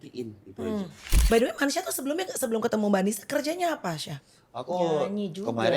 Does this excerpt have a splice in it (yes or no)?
yes